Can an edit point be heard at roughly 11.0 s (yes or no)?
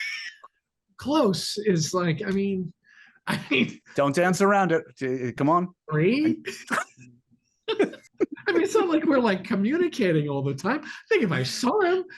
no